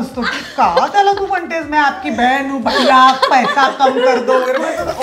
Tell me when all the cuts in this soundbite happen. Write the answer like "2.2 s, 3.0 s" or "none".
none